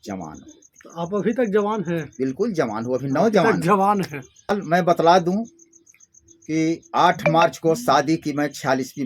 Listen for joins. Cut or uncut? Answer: cut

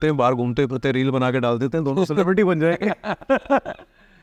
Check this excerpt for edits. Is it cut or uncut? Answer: uncut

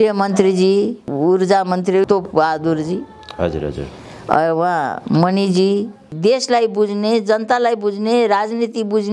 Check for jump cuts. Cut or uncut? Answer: cut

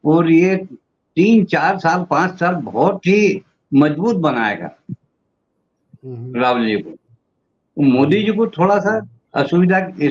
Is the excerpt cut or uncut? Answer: uncut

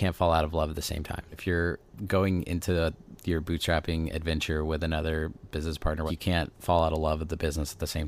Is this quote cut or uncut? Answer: cut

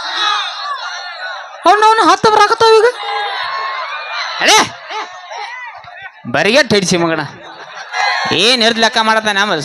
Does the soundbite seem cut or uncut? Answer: cut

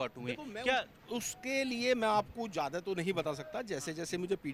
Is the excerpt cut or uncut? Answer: uncut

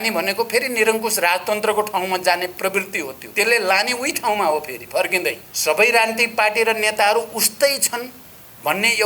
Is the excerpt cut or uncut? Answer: cut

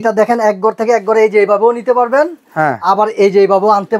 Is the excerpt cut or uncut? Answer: uncut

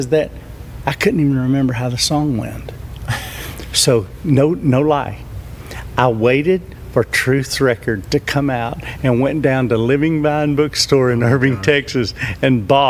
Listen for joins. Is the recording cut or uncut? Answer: uncut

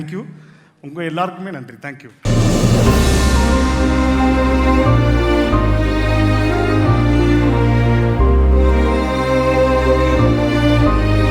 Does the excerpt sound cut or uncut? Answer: cut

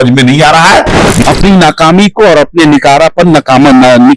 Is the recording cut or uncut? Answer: cut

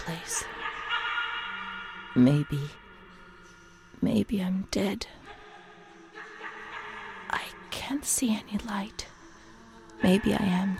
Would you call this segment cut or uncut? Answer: uncut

